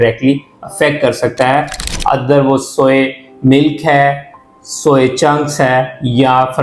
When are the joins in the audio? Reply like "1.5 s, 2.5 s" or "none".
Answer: 1.8 s